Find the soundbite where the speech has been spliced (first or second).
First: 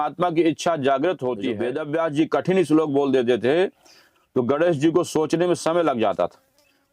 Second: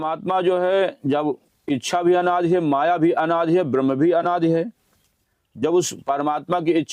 first